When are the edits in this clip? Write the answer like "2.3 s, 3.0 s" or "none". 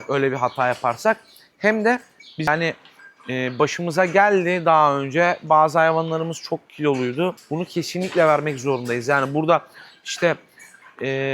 2.5 s, 7.4 s